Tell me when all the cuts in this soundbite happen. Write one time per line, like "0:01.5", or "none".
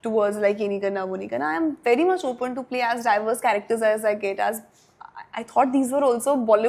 none